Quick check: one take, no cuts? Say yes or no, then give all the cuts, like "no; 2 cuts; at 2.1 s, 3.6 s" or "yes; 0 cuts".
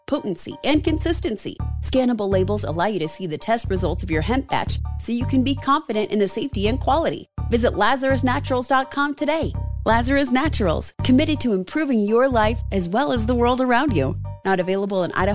yes; 0 cuts